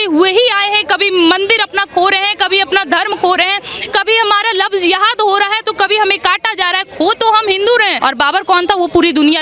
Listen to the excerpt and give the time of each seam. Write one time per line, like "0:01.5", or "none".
0:07.9